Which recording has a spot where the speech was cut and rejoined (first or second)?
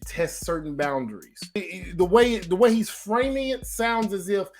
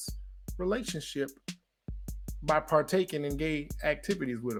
first